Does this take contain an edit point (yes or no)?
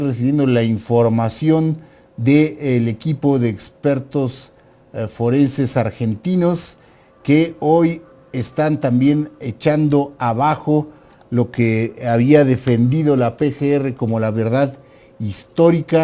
yes